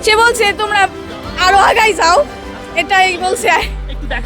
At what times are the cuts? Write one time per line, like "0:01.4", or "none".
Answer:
none